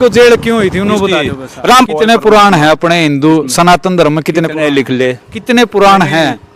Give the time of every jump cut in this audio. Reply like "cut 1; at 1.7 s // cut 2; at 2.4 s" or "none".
cut 1; at 1.9 s